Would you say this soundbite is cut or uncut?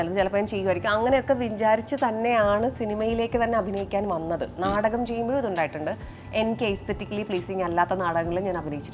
uncut